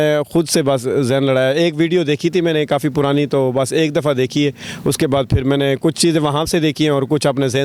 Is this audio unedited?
yes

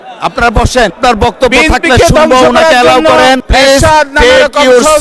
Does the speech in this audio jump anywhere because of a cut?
yes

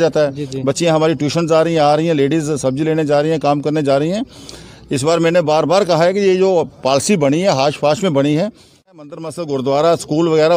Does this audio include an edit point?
yes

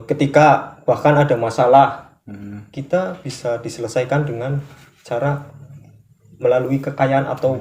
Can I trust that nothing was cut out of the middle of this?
yes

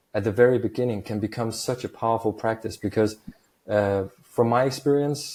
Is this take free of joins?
yes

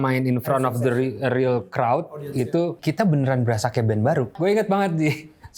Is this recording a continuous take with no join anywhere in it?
no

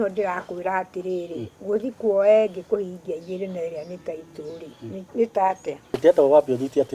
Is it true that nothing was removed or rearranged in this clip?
no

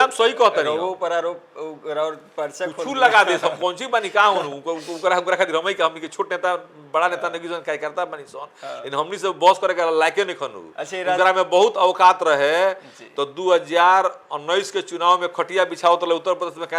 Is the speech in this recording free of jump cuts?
yes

